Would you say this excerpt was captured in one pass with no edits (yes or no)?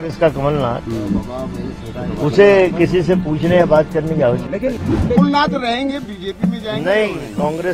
no